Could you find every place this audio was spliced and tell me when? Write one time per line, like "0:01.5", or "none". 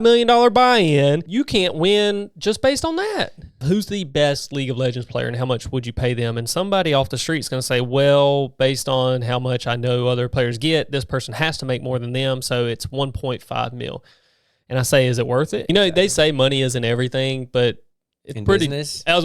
0:01.2
0:03.6
0:10.3
0:15.6

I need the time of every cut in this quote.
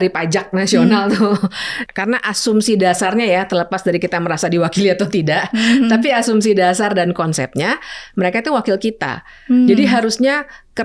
0:01.8

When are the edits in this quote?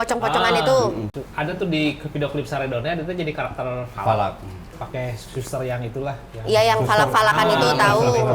0:01.1

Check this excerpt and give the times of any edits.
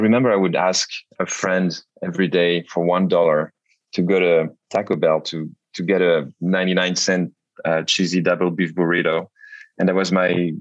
none

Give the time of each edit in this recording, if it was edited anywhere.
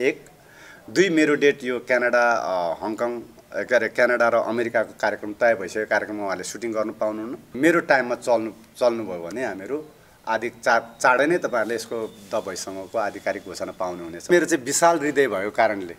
0:07.5
0:14.3

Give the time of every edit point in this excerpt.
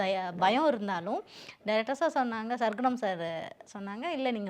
none

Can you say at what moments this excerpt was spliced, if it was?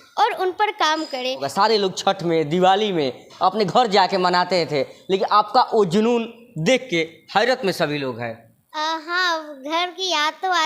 0:01.4

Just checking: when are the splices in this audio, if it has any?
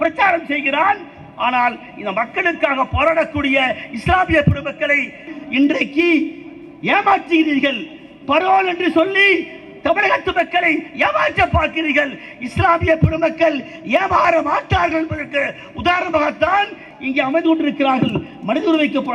0:05.4

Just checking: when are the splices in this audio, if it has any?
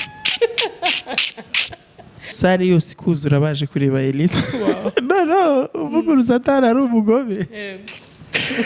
0:02.3

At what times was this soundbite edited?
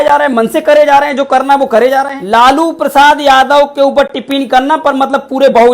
0:02.2

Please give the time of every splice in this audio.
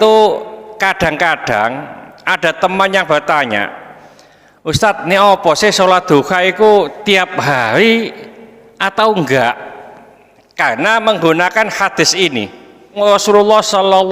0:13.0

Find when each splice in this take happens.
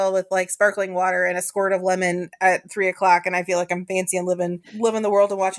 0:04.6

